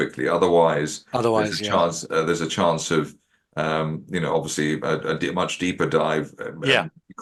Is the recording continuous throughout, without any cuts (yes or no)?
yes